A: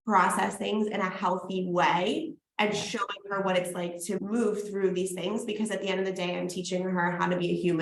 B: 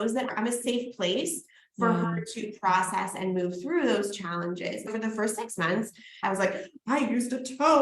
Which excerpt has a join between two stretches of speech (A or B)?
B